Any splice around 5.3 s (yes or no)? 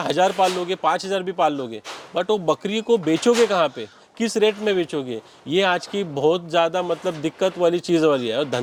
no